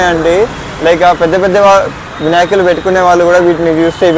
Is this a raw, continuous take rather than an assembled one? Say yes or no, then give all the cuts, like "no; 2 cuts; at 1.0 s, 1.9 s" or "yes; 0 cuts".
yes; 0 cuts